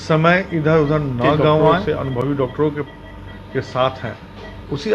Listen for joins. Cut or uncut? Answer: cut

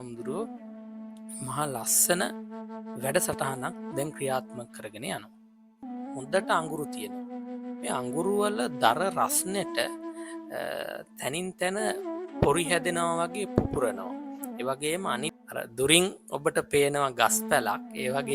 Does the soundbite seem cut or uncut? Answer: cut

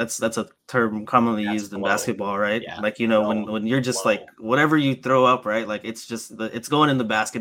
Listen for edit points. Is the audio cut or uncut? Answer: uncut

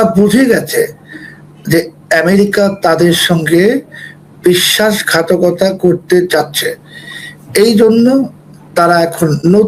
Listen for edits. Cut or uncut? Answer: uncut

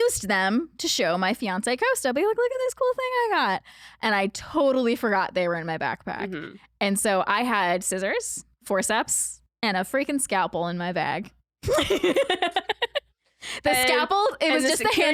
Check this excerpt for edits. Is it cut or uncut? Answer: uncut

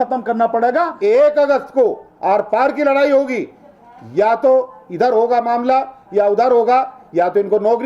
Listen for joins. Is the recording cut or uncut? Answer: cut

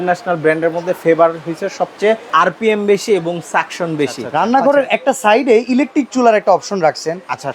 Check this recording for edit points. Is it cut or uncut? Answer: cut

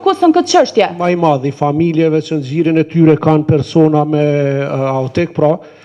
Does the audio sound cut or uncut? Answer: cut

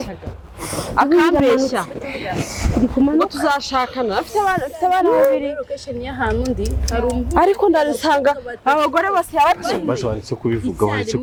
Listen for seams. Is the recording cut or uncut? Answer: uncut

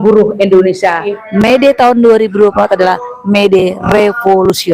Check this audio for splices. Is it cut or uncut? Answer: cut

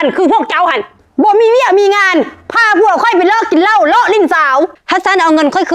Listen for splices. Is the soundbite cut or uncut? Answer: cut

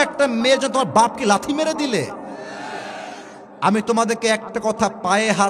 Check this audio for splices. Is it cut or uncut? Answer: uncut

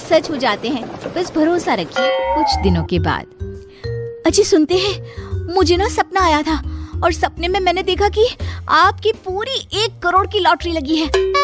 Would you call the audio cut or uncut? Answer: cut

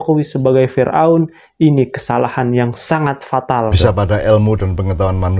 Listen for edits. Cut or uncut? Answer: cut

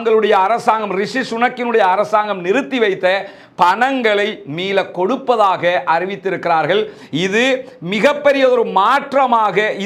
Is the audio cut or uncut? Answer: uncut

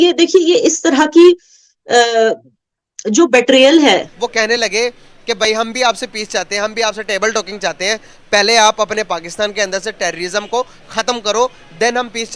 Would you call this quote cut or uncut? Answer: cut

